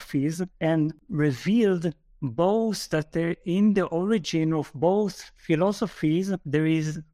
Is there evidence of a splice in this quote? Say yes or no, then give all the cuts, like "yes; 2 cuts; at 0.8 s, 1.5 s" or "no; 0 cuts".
no; 0 cuts